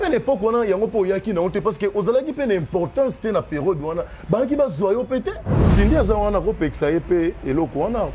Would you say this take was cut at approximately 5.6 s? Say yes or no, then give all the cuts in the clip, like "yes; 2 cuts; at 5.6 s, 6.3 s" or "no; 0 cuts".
yes; 1 cut; at 5.6 s